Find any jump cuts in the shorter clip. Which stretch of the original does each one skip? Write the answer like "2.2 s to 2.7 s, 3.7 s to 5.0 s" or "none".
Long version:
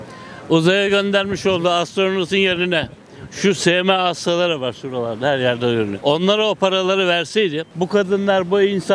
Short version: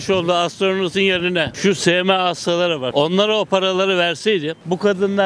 2.9 s to 3.3 s, 4.7 s to 6.0 s